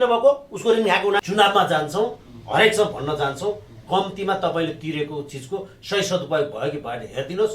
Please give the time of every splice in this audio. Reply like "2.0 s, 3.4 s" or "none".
1.2 s